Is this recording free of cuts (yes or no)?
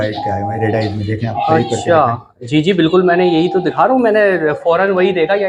yes